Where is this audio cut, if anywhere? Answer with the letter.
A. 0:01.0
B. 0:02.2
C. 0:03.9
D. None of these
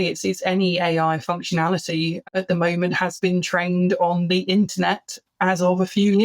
B